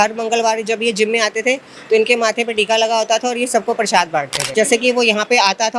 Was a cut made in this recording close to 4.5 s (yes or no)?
yes